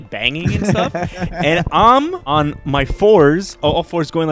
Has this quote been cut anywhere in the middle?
yes; 1 cut; at 2.2 s

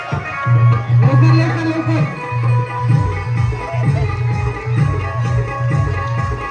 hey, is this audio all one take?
yes; 0 cuts

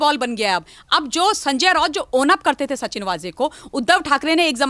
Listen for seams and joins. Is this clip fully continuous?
yes; 0 cuts

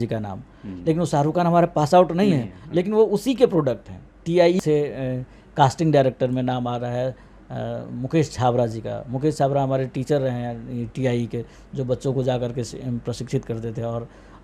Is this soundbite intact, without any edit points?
no; 1 cut; at 4.6 s

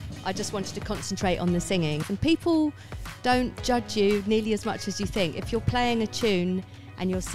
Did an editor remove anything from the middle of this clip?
yes; 1 cut; at 2.0 s

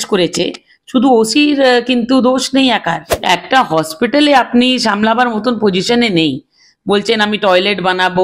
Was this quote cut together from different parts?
yes; 1 cut; at 3.1 s

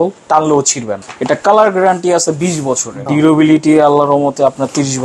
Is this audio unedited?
no; 2 cuts; at 1.0 s, 3.0 s

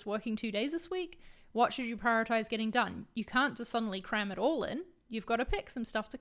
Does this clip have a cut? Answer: no; 0 cuts

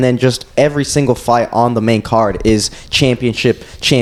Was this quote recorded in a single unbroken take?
yes; 0 cuts

